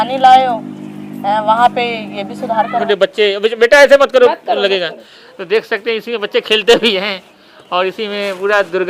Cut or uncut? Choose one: cut